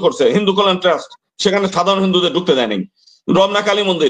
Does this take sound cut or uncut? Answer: uncut